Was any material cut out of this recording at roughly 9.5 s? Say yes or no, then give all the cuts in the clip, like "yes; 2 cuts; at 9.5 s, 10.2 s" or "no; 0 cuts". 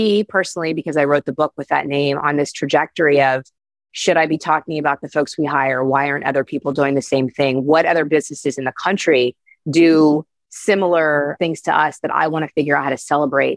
no; 1 cut; at 11.4 s